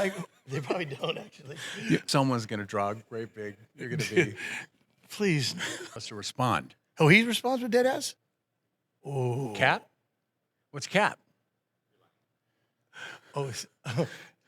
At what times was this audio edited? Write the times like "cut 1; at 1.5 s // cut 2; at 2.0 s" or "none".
cut 1; at 2.0 s // cut 2; at 5.9 s